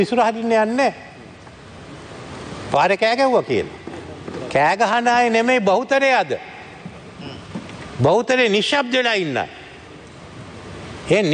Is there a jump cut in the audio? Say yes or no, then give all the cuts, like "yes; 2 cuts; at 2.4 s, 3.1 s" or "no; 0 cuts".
no; 0 cuts